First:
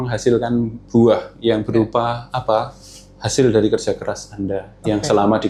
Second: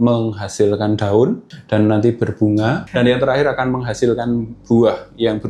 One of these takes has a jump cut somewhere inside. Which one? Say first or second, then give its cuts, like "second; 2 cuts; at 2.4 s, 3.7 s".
second; 2 cuts; at 1.4 s, 2.8 s